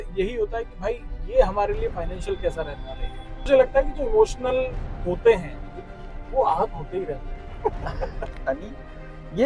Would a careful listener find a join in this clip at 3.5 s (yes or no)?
yes